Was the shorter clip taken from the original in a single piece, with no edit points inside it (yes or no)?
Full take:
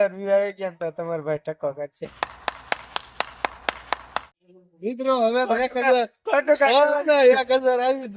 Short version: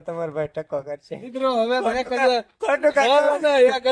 no